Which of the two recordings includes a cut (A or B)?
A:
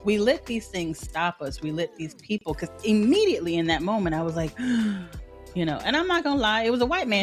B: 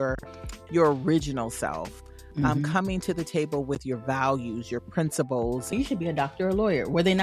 B